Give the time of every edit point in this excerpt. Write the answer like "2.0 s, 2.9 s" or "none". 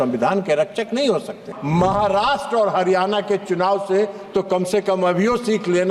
1.5 s